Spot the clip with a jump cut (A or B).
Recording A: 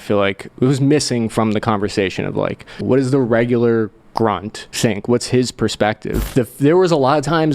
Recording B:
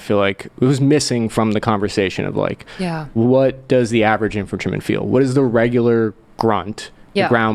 A